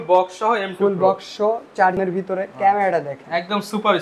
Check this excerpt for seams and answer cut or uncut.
cut